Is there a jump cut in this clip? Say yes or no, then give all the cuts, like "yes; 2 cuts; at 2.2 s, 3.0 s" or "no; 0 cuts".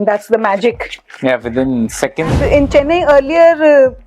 yes; 1 cut; at 2.3 s